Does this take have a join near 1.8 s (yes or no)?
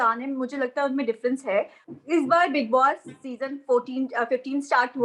yes